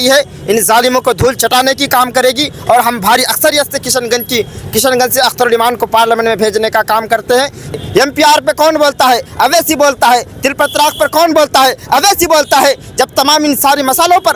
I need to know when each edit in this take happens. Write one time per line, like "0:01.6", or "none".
0:07.8